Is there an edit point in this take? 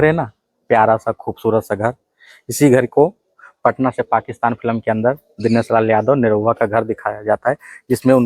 no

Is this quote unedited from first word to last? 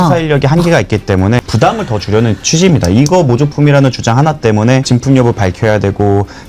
no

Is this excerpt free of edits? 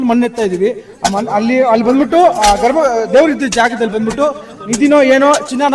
yes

